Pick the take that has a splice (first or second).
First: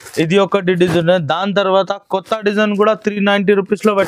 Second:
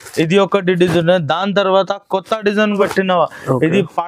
second